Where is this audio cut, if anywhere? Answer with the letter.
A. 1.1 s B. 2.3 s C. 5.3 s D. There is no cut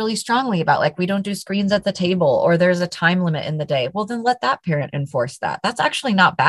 D